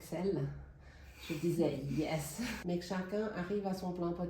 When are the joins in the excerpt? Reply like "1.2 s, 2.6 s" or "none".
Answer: 2.6 s